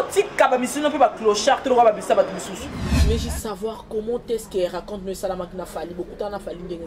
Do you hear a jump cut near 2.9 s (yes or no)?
yes